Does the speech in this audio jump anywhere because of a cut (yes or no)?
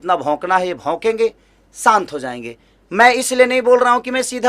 no